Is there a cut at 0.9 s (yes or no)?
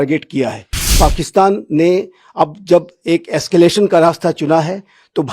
yes